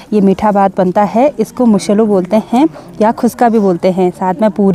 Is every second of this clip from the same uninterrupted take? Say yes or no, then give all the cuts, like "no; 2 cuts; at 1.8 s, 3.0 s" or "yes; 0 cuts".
yes; 0 cuts